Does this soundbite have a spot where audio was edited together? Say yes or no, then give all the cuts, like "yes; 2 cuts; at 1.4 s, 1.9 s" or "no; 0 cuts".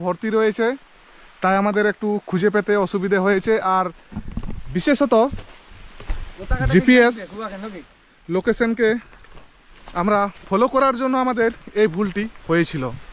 no; 0 cuts